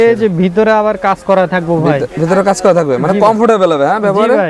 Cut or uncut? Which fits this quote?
uncut